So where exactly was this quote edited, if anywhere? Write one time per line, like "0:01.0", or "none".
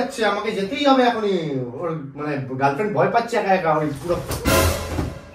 none